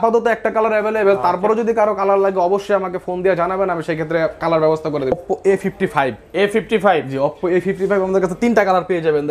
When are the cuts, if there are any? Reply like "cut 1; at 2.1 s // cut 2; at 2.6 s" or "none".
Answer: cut 1; at 5.1 s